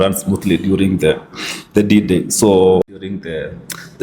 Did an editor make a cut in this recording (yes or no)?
yes